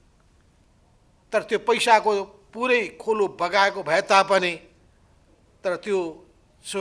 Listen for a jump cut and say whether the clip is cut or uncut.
uncut